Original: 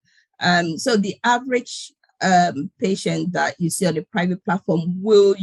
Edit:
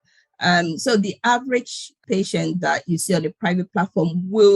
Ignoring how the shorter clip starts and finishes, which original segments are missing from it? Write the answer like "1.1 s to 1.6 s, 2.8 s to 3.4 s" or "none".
1.9 s to 2.7 s